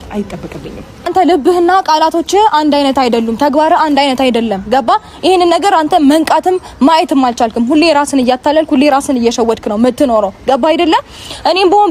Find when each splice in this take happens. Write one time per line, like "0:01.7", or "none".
0:01.1